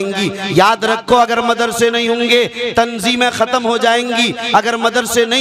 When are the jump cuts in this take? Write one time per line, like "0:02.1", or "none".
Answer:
none